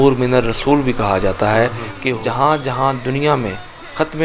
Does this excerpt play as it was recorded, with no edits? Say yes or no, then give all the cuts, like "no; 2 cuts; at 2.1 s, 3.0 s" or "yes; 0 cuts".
no; 1 cut; at 1.9 s